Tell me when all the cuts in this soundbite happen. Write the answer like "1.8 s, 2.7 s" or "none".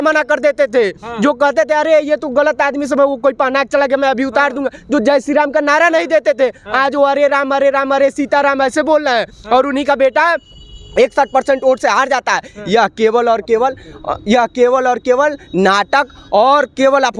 none